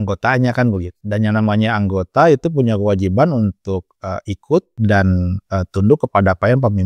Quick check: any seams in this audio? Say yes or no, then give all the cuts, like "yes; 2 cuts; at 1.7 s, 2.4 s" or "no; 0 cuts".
yes; 2 cuts; at 0.9 s, 4.7 s